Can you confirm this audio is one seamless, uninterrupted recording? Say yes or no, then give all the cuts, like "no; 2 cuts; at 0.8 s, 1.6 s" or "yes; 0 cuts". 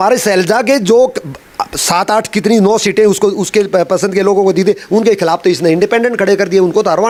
yes; 0 cuts